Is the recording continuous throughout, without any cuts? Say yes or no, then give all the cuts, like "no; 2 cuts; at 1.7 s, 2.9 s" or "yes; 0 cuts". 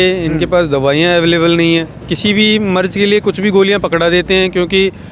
no; 1 cut; at 2.0 s